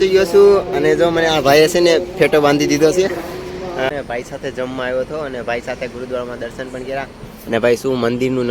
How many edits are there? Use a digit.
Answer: 1